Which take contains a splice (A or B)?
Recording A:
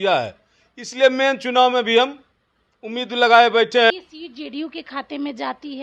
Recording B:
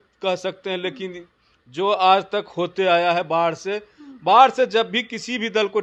A